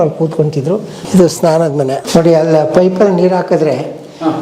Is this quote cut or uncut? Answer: cut